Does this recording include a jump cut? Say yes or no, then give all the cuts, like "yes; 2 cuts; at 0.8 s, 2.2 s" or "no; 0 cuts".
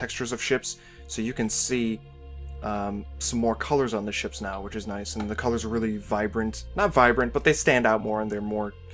yes; 1 cut; at 1.0 s